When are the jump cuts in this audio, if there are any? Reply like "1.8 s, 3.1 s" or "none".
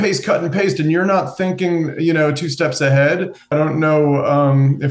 3.5 s